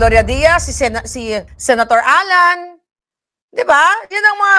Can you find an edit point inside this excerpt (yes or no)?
yes